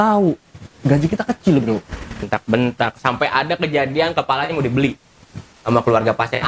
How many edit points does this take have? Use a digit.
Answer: 1